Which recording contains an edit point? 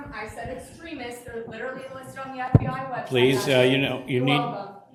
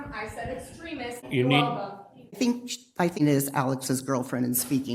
second; 3 cuts; at 1.3 s, 2.4 s, 3.2 s

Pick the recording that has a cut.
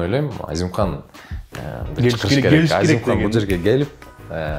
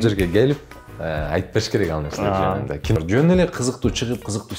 second; 1 cut; at 3.0 s

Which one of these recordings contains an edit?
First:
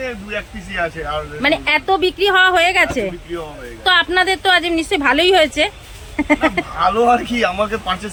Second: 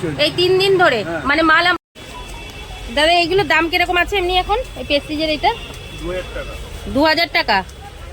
second; 1 cut; at 1.8 s

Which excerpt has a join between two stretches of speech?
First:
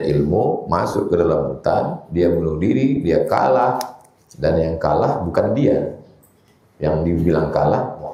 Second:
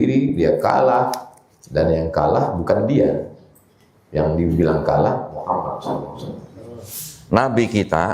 second; 1 cut; at 6.9 s

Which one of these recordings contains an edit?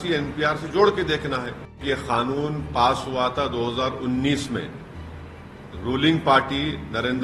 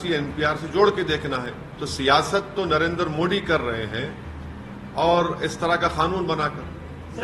first; 1 cut; at 1.8 s

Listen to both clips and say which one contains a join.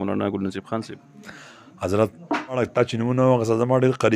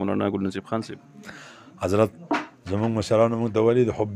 first; 1 cut; at 2.6 s

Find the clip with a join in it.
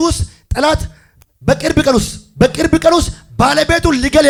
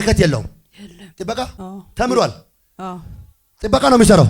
second; 1 cut; at 1.6 s

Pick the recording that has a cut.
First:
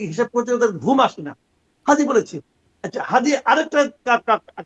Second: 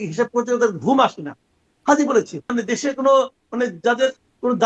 second; 1 cut; at 2.5 s

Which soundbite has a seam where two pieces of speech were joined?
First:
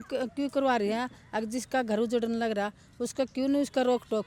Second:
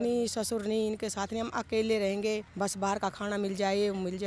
second; 1 cut; at 2.5 s

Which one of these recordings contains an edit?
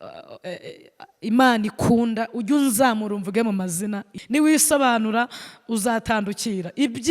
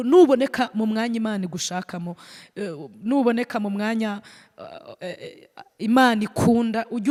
first; 1 cut; at 4.1 s

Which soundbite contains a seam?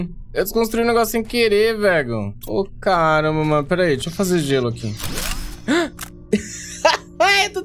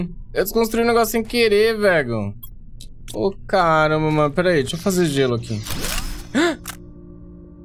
first; 2 cuts; at 2.3 s, 6.1 s

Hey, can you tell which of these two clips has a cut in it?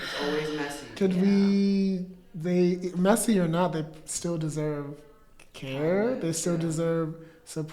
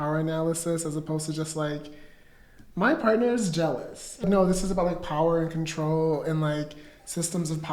second; 1 cut; at 4.2 s

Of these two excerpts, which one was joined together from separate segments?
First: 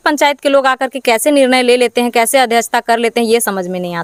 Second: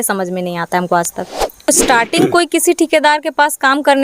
second; 1 cut; at 1.7 s

